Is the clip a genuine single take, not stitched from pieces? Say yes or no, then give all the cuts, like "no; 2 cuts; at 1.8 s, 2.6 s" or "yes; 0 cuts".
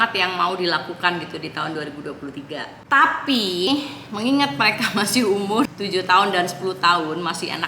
no; 1 cut; at 3.7 s